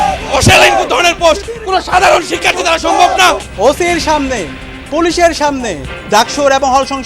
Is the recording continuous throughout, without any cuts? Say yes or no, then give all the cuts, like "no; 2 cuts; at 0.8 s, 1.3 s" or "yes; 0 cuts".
no; 1 cut; at 3.4 s